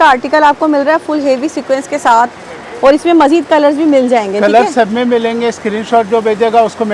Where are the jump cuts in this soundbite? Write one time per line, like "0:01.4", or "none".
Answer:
none